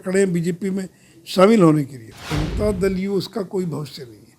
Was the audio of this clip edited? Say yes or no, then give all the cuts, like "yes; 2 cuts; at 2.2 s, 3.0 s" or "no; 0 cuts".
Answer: yes; 1 cut; at 2.4 s